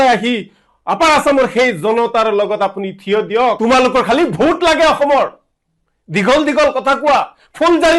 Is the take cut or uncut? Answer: cut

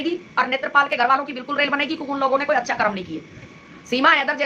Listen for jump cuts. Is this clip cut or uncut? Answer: cut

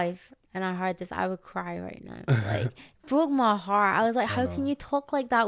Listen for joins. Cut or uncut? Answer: uncut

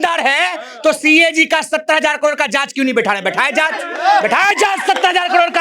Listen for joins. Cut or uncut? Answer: uncut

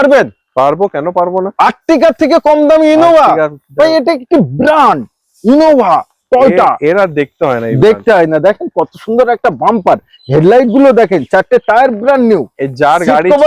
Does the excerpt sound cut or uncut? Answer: uncut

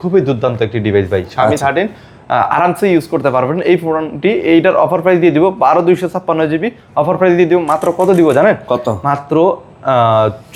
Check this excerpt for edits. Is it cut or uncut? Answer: uncut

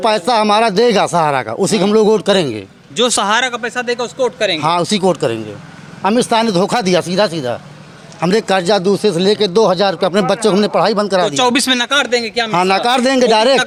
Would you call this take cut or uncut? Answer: uncut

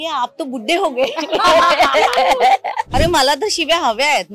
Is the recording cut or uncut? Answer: cut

